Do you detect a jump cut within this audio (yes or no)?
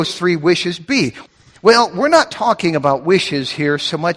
yes